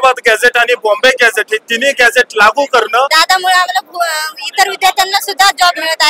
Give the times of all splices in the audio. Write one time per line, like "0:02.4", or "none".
0:03.1